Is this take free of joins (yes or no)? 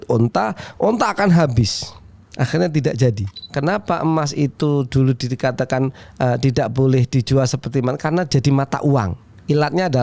no